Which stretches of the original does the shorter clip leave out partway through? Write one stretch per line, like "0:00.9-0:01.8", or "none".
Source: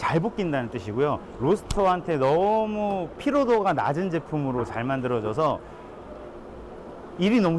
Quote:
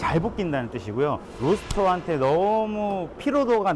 none